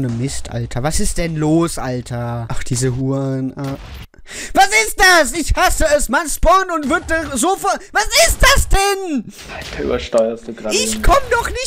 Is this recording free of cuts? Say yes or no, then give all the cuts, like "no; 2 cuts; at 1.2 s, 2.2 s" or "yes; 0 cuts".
no; 1 cut; at 2.6 s